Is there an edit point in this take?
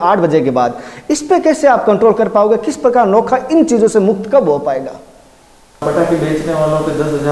yes; 1 cut; at 5.8 s

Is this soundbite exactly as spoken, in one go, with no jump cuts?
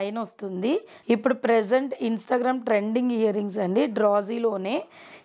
no; 1 cut; at 0.9 s

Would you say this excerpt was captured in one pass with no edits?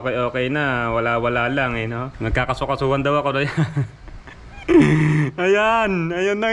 no; 1 cut; at 2.1 s

